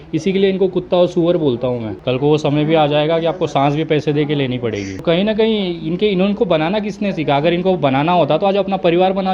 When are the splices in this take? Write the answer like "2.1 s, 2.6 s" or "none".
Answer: 1.9 s, 5.0 s